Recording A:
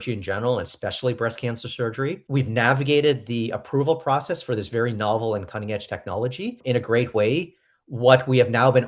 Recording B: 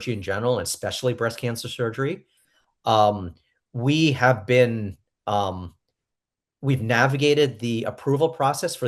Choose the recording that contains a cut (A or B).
A